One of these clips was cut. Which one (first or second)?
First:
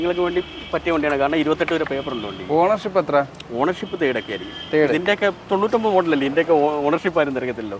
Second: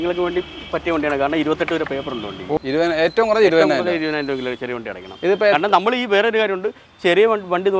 second